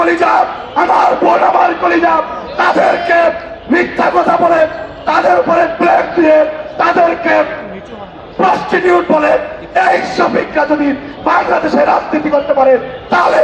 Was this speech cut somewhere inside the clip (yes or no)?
no